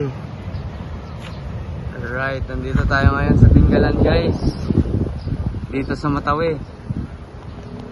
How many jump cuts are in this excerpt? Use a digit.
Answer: 0